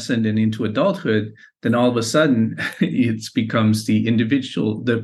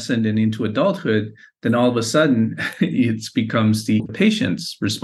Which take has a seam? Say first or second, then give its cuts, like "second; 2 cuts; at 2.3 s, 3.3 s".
second; 1 cut; at 4.0 s